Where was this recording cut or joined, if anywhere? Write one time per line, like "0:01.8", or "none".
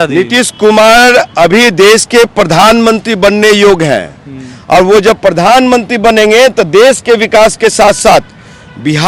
none